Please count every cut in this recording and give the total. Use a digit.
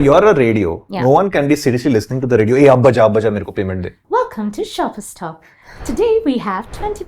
1